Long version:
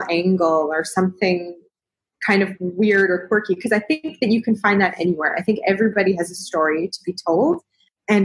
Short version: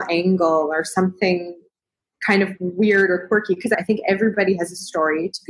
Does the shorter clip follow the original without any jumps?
no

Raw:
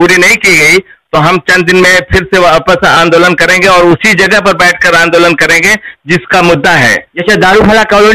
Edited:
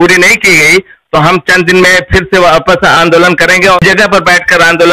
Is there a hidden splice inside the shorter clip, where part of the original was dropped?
yes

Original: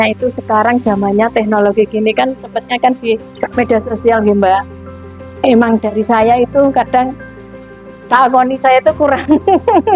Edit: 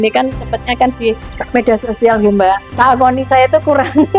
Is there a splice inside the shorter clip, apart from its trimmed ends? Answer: yes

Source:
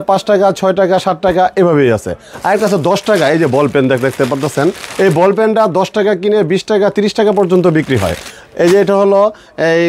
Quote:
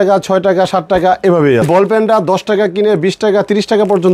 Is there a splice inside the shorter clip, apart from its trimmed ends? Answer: yes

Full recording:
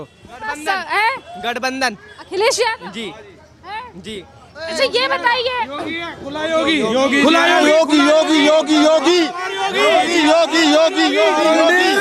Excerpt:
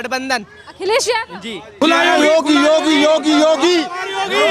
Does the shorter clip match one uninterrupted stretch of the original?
no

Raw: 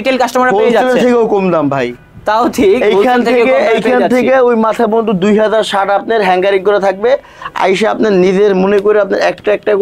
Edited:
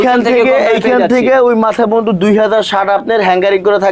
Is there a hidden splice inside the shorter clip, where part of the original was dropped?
no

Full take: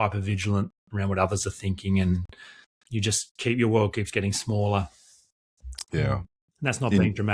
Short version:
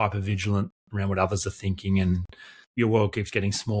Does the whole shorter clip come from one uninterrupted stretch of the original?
no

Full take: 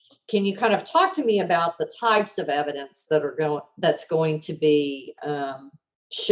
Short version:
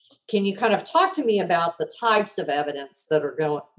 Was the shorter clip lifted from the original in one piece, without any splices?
yes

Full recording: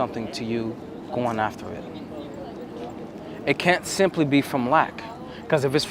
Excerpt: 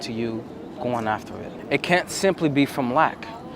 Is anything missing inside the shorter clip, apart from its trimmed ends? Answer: yes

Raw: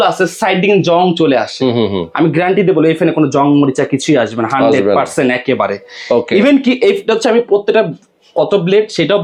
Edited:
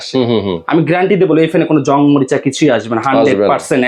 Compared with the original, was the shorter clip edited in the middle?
no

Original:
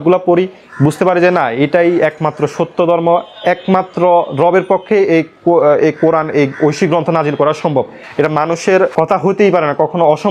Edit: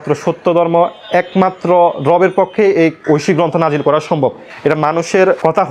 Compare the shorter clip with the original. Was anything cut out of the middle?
yes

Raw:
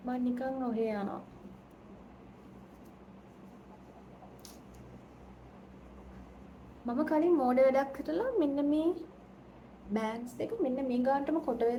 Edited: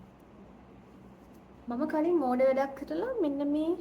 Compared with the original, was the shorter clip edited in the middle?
yes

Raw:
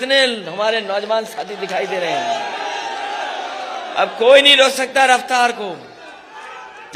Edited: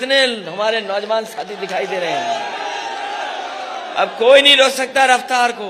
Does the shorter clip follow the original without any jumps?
yes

